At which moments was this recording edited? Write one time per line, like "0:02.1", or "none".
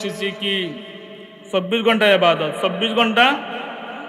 none